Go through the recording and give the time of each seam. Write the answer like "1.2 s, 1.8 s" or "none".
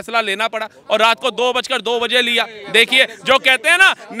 none